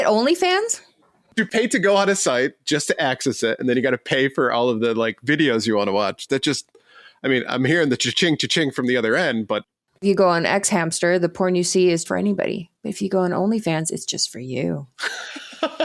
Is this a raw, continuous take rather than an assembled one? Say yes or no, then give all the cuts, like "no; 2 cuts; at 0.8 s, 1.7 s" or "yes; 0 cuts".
no; 1 cut; at 1.3 s